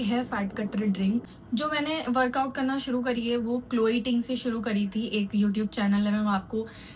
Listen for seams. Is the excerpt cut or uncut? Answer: uncut